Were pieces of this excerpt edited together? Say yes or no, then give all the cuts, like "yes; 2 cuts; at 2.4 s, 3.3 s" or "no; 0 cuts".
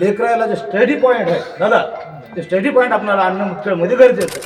no; 0 cuts